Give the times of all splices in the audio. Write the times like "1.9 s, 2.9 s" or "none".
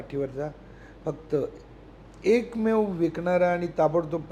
none